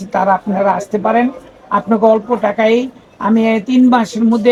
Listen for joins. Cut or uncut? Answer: uncut